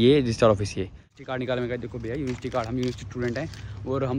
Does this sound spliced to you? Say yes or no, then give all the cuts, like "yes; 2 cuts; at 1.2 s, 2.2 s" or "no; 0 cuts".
yes; 1 cut; at 1.1 s